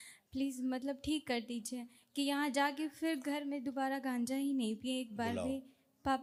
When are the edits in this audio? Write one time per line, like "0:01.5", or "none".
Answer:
none